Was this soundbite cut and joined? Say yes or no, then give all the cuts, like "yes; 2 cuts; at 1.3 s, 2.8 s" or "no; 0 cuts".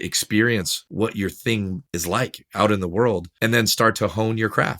yes; 1 cut; at 3.8 s